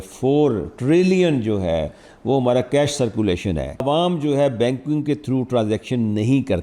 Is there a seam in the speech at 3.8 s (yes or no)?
yes